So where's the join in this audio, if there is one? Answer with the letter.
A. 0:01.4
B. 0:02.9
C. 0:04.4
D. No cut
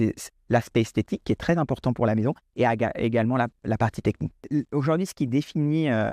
C